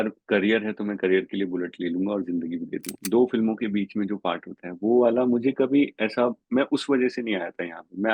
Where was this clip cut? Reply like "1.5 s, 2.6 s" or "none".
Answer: 3.0 s